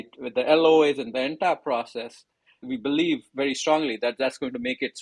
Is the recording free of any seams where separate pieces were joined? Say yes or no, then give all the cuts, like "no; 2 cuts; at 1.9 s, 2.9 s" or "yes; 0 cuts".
no; 1 cut; at 2.6 s